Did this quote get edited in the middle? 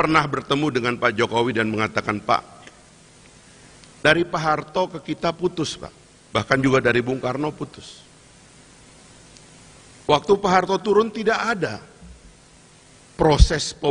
no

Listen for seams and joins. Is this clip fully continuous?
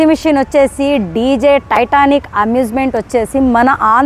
yes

